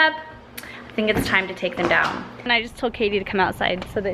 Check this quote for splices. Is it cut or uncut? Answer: cut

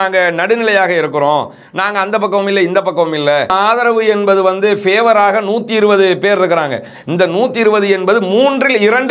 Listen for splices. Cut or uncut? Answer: cut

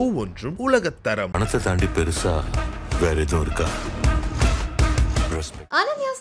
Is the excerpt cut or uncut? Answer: uncut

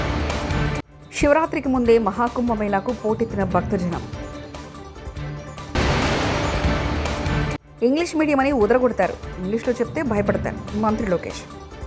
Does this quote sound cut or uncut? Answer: cut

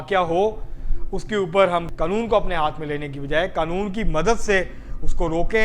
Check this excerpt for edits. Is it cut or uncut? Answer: uncut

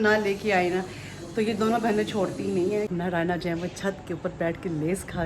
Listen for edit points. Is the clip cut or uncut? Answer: cut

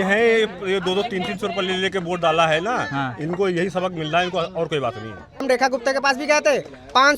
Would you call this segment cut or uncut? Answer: cut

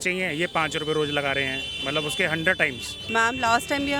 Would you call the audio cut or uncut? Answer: cut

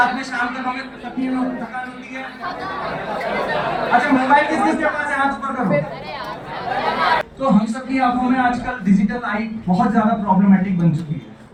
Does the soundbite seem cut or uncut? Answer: uncut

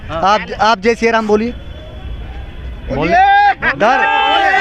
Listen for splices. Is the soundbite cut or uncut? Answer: uncut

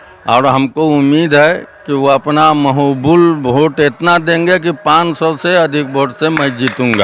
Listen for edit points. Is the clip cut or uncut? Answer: uncut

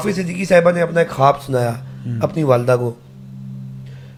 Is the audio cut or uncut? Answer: uncut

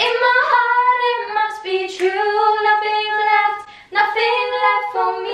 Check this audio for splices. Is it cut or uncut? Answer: uncut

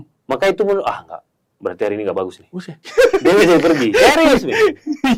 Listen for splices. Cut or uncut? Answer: uncut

